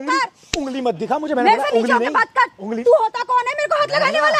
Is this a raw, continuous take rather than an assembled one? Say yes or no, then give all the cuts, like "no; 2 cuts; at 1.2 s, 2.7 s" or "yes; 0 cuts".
yes; 0 cuts